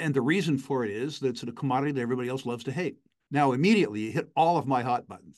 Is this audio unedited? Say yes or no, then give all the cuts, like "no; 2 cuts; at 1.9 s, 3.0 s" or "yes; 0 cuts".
no; 1 cut; at 3.1 s